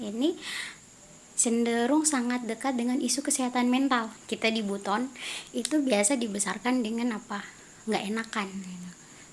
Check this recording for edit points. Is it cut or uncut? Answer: cut